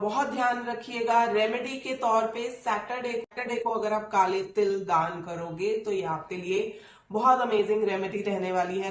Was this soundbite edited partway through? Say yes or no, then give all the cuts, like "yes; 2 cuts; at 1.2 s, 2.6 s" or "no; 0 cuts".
no; 0 cuts